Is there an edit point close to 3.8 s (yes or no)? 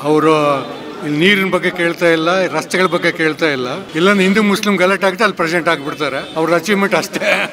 yes